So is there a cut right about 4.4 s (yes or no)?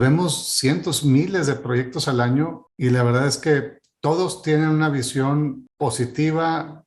no